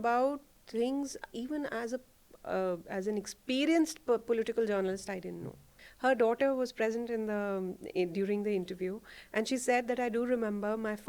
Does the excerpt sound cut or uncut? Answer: cut